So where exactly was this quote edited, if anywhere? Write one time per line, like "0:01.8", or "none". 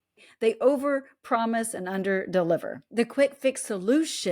0:02.8